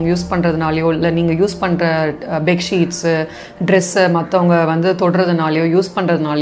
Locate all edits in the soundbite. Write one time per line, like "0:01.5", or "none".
none